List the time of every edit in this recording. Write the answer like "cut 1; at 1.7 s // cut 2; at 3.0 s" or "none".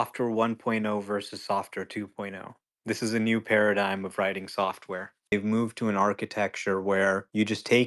cut 1; at 5.3 s